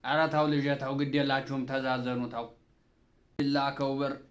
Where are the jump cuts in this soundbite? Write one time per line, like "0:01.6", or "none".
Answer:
0:03.4